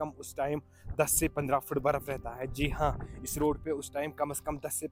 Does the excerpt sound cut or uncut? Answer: uncut